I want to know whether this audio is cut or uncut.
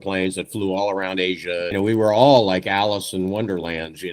cut